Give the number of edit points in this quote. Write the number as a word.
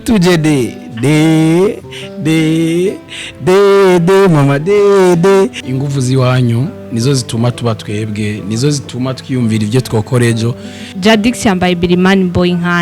two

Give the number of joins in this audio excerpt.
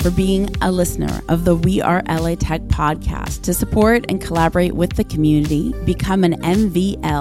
zero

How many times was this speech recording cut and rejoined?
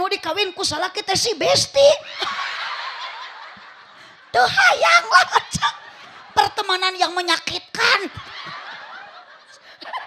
zero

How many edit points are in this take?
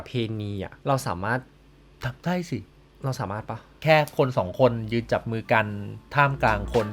one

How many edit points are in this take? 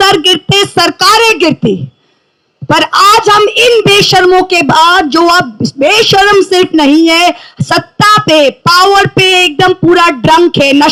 zero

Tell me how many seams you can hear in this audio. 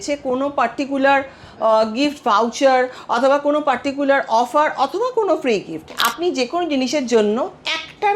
one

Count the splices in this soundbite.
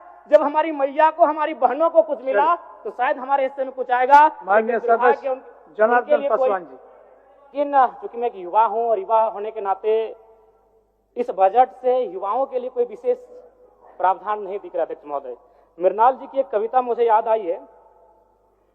one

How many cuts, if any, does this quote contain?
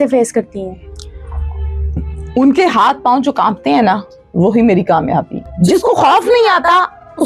one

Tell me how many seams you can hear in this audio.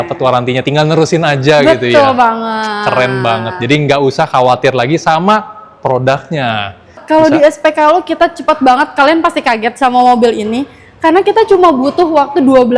one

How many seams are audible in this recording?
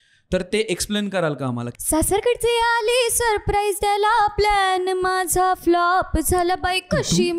one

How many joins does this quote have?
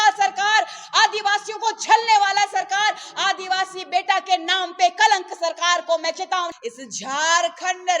one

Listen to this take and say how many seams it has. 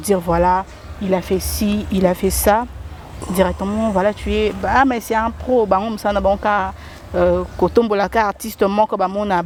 zero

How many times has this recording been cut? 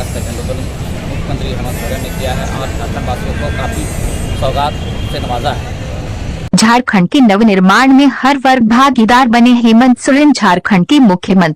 one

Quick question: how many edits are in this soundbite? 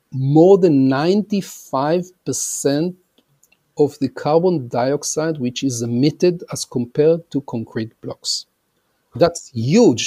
one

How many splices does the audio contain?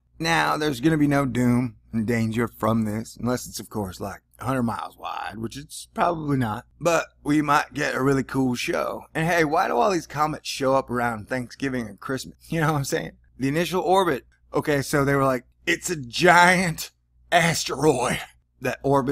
one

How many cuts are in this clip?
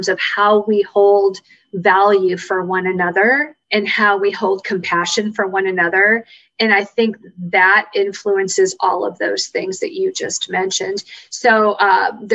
zero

